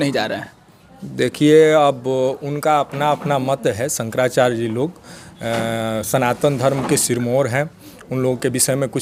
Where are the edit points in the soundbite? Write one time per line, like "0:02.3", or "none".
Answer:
none

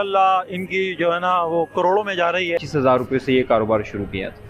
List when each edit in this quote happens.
0:02.7

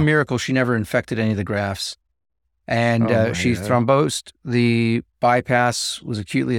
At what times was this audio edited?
none

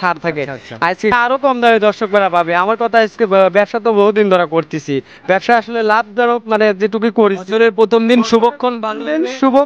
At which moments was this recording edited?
0:01.1

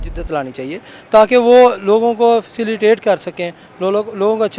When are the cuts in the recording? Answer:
none

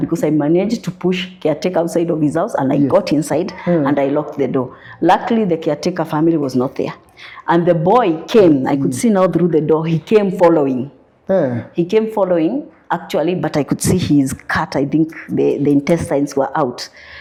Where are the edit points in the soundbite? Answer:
none

